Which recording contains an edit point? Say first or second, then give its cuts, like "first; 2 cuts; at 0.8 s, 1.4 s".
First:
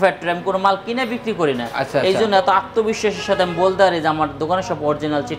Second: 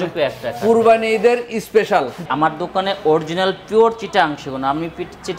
second; 1 cut; at 2.2 s